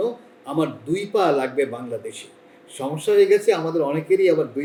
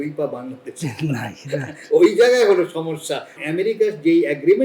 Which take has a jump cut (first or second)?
second